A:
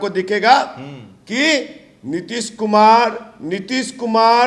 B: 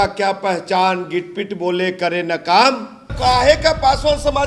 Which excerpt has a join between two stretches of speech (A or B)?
B